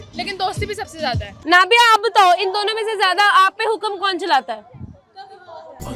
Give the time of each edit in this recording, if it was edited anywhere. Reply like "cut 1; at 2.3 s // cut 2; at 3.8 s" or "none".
cut 1; at 1.3 s